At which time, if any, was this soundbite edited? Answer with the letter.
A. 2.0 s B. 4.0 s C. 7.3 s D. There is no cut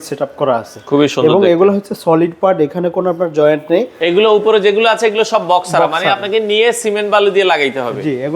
B